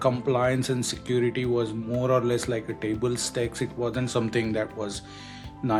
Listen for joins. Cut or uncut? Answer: uncut